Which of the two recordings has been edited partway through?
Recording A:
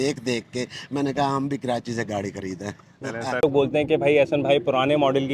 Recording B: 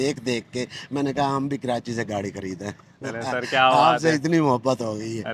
A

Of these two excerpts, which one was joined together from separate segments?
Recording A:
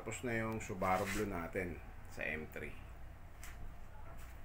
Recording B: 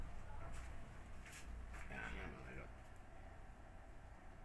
B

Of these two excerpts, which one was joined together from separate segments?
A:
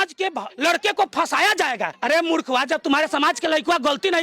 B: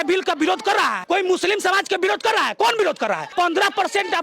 B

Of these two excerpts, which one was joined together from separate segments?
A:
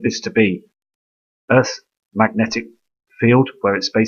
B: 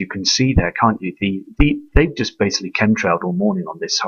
B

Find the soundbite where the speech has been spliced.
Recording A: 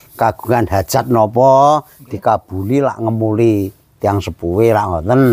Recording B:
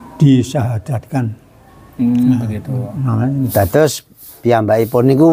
B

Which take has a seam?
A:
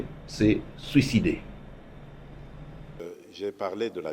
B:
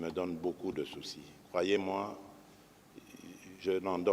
A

